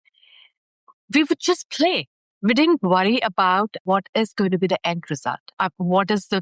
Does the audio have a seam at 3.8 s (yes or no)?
yes